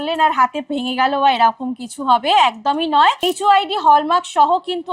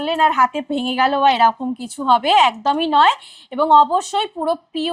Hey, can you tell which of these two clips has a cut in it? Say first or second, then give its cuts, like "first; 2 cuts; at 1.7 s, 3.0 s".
first; 1 cut; at 3.2 s